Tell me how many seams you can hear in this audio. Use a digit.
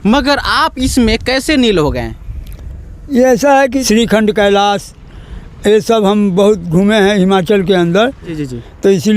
2